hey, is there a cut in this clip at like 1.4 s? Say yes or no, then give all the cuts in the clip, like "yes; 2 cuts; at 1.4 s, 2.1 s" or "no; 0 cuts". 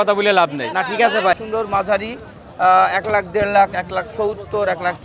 yes; 1 cut; at 1.4 s